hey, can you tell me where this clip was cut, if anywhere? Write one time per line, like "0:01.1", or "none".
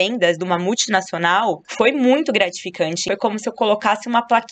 0:01.7
0:03.0